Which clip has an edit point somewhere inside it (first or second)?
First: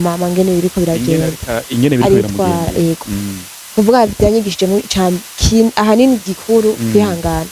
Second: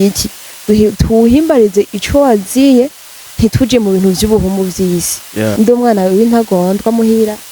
second